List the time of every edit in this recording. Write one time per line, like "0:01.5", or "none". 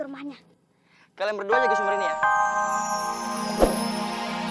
0:01.6